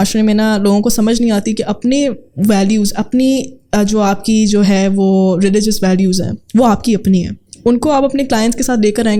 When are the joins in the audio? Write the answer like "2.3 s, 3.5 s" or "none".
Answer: none